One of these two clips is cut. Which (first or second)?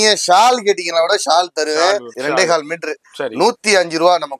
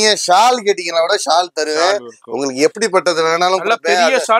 first